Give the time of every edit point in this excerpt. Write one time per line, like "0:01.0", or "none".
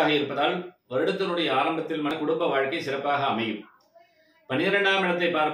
0:02.1